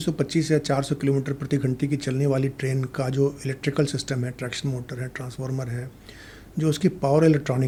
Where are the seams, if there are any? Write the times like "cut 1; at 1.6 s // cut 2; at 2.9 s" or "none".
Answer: none